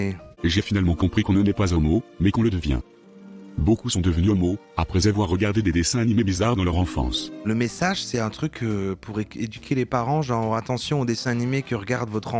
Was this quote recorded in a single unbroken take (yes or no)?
yes